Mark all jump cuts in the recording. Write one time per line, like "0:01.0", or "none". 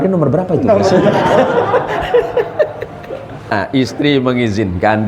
0:03.5